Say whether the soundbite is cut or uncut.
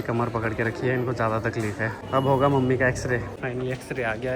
cut